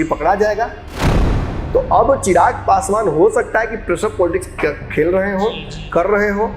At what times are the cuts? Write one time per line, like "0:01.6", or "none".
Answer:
0:01.0